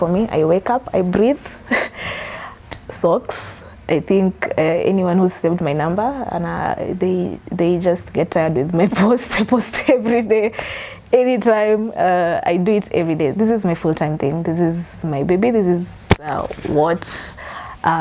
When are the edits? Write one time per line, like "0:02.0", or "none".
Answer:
none